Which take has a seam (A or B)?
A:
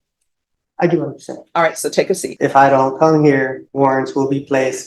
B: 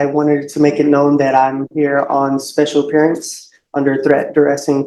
A